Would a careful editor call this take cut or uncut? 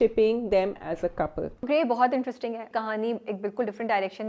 cut